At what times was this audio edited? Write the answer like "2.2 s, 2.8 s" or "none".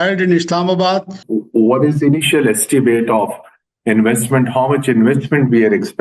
1.2 s